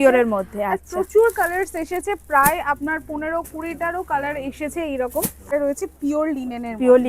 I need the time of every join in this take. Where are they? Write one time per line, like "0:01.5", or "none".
0:05.4

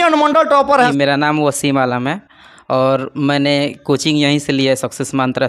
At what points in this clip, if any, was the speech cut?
0:00.9

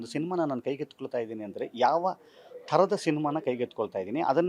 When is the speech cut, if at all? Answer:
none

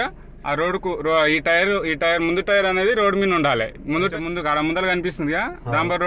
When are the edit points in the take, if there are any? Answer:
none

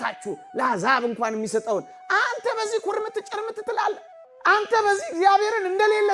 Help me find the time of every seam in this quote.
none

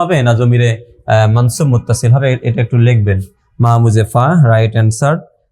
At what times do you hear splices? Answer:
none

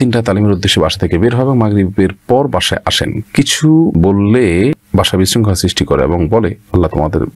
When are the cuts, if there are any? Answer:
none

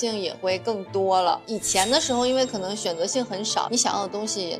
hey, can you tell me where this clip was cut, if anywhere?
0:03.7

